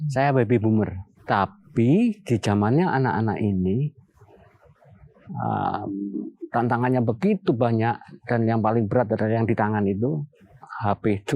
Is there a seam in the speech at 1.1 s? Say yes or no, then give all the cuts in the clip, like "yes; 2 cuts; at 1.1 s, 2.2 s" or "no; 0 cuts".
yes; 1 cut; at 1.1 s